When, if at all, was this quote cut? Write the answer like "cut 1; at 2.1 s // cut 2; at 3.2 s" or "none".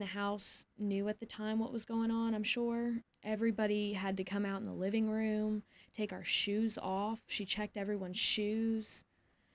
cut 1; at 3.1 s